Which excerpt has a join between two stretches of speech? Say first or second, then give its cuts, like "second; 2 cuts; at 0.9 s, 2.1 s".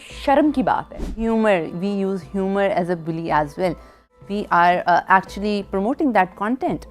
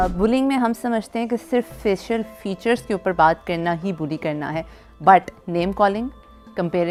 first; 2 cuts; at 1.1 s, 4.0 s